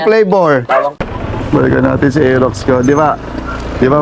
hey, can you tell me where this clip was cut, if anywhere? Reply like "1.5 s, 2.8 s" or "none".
1.0 s